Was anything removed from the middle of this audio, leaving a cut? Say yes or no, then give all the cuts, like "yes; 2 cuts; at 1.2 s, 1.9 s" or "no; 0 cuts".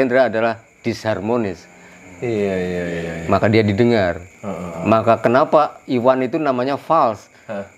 no; 0 cuts